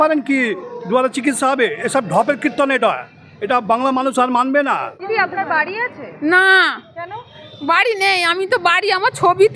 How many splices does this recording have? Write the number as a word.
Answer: one